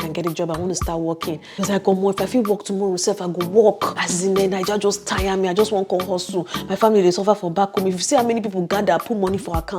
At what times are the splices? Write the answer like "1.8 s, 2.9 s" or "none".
1.5 s, 4.0 s